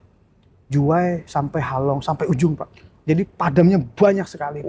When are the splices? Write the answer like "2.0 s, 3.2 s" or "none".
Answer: none